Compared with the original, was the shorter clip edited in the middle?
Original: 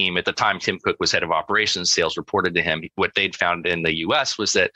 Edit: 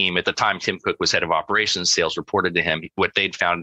no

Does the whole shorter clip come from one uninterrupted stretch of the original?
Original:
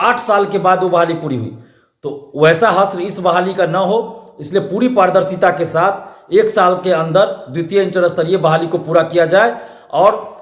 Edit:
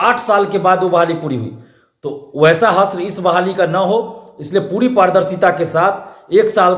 yes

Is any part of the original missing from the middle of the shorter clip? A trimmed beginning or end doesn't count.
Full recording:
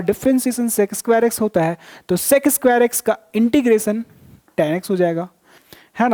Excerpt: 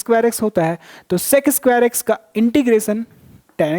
no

